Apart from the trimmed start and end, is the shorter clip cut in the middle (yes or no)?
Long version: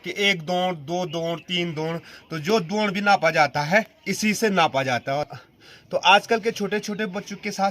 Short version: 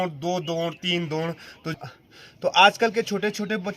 yes